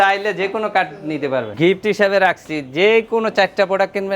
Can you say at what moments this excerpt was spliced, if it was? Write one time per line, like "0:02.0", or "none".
0:01.6